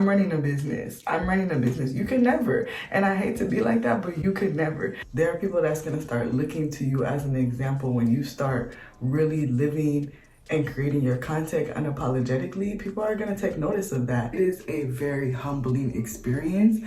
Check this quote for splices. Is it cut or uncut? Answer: cut